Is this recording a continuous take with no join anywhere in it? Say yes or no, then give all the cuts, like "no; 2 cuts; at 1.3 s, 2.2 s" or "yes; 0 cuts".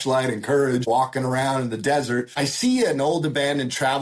no; 2 cuts; at 0.9 s, 2.3 s